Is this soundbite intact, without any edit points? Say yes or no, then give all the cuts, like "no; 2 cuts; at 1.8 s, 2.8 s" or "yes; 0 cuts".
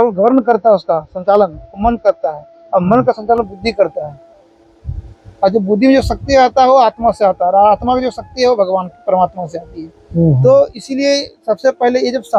yes; 0 cuts